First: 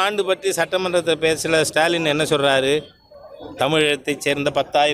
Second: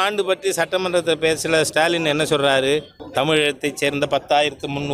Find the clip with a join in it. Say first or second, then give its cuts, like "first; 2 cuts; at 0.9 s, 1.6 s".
second; 1 cut; at 3.0 s